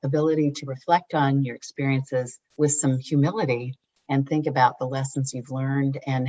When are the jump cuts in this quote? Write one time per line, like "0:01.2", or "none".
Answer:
none